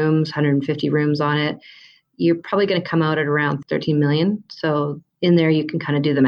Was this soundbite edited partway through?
yes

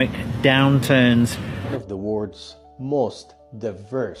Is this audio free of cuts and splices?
no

